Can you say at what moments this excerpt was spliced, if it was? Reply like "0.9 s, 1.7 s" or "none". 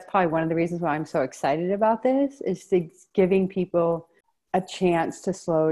none

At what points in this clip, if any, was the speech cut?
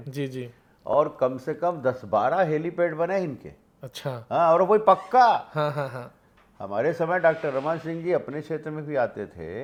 none

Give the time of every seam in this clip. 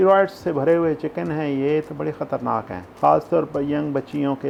none

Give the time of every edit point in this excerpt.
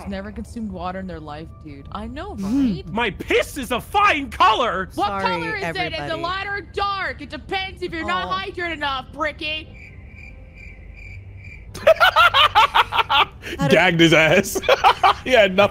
4.9 s

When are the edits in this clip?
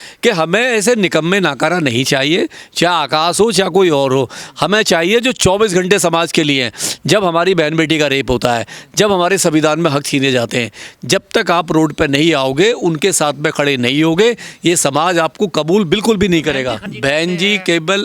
16.9 s

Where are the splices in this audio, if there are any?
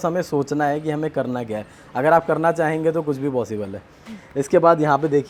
none

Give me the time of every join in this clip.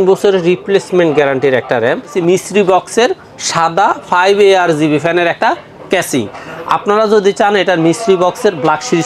2.1 s

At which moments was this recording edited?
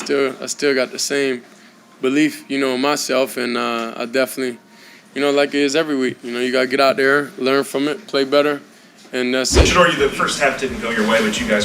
9.7 s

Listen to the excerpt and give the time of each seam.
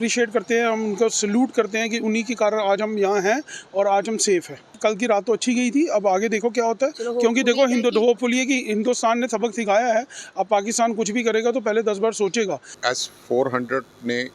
4.7 s, 12.8 s

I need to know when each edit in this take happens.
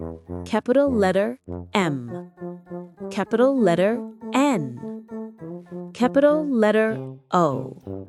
none

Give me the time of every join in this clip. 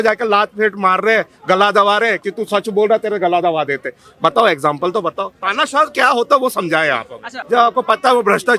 7.3 s

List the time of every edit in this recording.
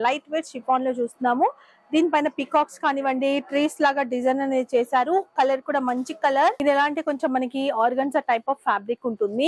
6.6 s

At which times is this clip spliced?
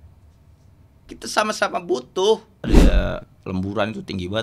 2.8 s

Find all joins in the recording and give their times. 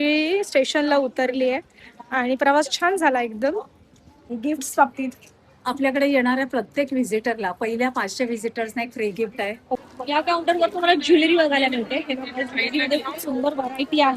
4.3 s, 9.8 s

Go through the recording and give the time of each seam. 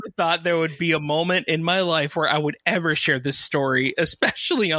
none

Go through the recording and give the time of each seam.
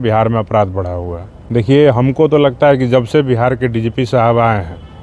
none

